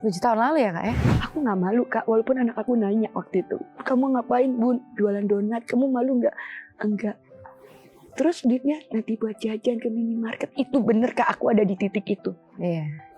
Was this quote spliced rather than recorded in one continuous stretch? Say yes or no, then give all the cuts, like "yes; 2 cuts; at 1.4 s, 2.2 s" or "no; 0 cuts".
yes; 1 cut; at 1.0 s